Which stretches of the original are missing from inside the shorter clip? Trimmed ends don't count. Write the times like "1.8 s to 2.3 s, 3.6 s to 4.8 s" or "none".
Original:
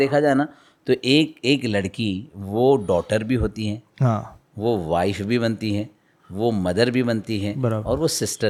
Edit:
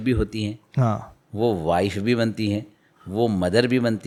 none